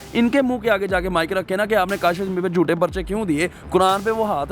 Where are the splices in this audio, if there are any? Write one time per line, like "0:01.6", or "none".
none